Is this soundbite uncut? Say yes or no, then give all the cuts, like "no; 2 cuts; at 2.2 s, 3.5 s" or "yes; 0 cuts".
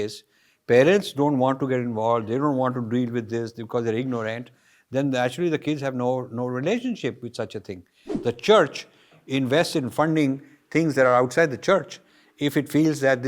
no; 1 cut; at 8.1 s